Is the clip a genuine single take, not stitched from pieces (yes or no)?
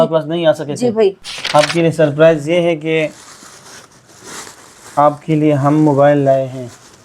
no